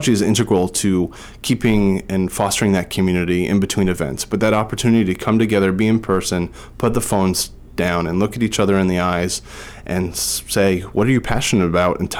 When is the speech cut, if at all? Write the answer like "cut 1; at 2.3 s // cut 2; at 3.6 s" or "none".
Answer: none